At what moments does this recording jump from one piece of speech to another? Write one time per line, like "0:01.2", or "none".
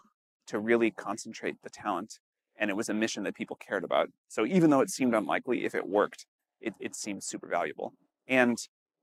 none